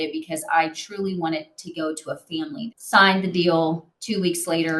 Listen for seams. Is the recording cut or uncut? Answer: cut